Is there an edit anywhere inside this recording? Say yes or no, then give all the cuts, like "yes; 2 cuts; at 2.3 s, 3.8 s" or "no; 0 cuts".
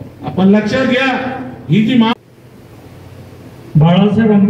yes; 1 cut; at 2.2 s